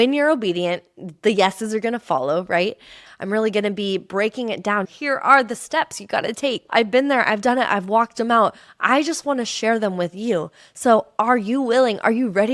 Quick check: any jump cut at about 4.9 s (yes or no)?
yes